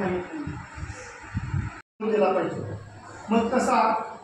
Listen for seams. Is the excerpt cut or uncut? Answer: cut